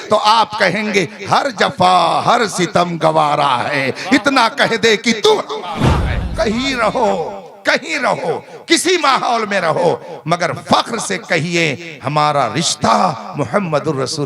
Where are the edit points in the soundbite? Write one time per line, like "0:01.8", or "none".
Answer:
0:06.2